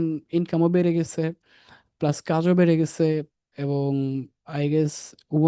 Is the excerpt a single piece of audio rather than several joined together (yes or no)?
yes